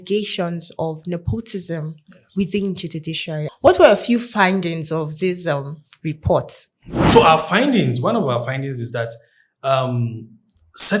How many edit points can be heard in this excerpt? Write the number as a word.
two